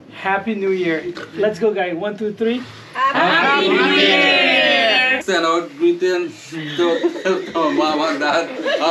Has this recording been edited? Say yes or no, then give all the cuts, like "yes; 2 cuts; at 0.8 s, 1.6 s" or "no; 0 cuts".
yes; 1 cut; at 5.2 s